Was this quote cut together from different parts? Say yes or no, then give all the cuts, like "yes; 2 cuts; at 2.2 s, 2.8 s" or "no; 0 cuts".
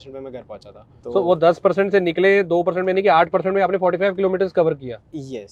no; 0 cuts